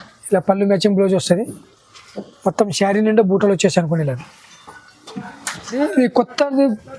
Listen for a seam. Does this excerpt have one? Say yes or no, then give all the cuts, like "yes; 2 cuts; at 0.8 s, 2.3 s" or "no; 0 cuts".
yes; 1 cut; at 5.8 s